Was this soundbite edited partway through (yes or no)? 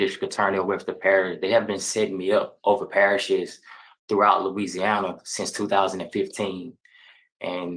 no